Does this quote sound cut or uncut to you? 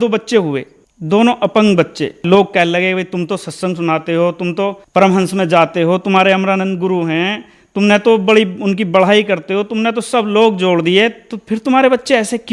cut